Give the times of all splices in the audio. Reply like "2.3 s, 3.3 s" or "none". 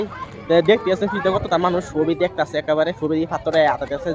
none